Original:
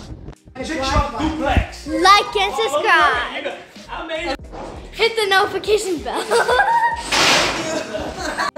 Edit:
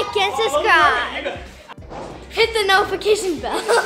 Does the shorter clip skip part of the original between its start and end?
yes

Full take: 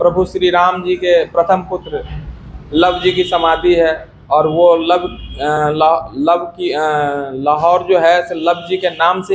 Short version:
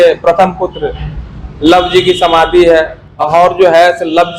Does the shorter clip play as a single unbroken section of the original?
no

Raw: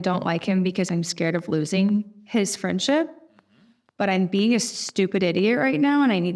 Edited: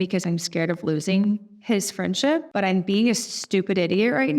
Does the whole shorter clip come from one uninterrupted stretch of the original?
no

